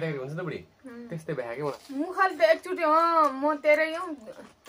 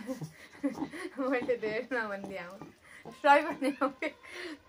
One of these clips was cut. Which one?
first; 1 cut; at 1.8 s

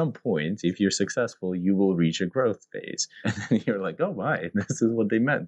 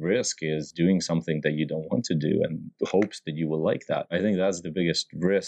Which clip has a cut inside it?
second; 1 cut; at 4.1 s

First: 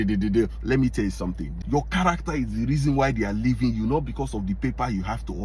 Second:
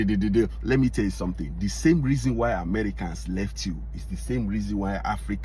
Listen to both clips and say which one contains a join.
first; 1 cut; at 1.5 s

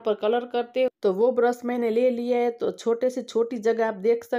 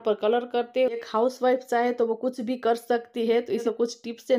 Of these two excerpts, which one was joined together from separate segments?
second; 2 cuts; at 1.0 s, 3.6 s

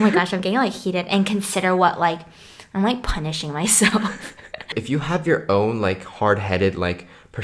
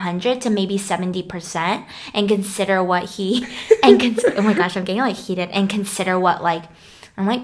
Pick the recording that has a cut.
first; 1 cut; at 4.8 s

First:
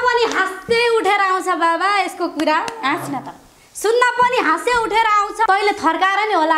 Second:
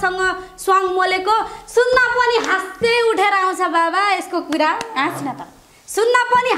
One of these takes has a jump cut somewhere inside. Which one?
first; 1 cut; at 5.4 s

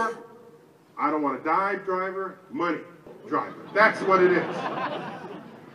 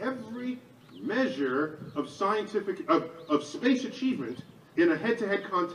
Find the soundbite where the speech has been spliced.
first; 1 cut; at 3.0 s

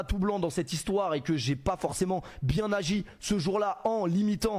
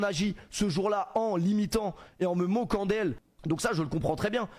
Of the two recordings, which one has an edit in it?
second; 1 cut; at 3.3 s

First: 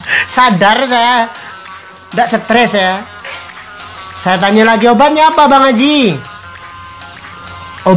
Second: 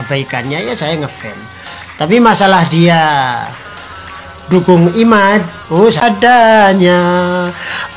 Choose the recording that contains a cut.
second; 1 cut; at 6.0 s

